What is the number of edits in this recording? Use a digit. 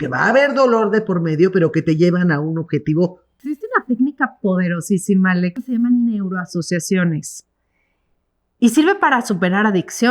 2